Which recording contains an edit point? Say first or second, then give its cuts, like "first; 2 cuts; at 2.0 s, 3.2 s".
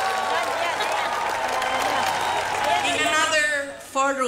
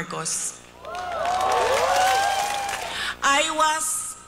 second; 1 cut; at 2.7 s